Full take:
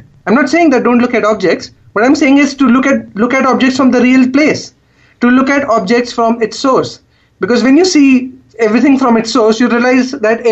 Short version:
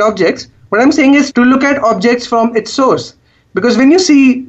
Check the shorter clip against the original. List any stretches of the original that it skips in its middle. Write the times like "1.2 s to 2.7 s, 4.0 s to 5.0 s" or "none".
2.5 s to 5.1 s